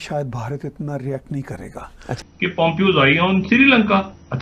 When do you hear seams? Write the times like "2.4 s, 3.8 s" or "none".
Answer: 2.2 s